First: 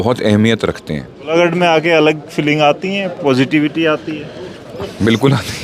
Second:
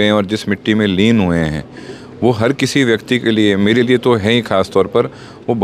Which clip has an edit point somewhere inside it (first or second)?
first